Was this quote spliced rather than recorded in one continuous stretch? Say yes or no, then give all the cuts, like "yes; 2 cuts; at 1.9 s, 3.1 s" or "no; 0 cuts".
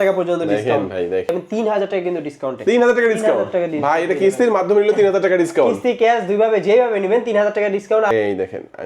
yes; 2 cuts; at 1.3 s, 8.1 s